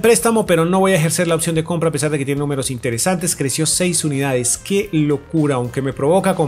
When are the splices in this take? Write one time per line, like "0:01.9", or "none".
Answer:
none